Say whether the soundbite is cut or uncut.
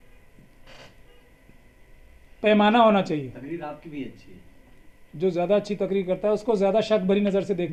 uncut